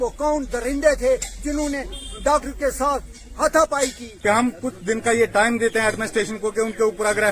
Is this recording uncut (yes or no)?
no